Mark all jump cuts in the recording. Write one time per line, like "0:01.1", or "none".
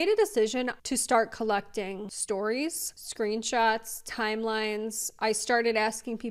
0:00.8
0:02.1